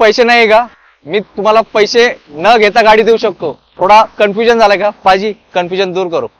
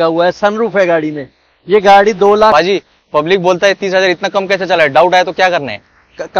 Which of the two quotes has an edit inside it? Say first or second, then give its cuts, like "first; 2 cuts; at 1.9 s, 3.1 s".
second; 1 cut; at 2.5 s